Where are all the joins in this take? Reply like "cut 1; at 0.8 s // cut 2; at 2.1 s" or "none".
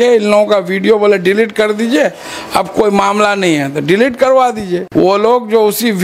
cut 1; at 4.8 s